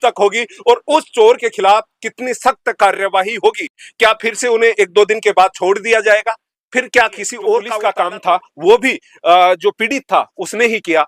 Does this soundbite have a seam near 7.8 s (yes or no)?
yes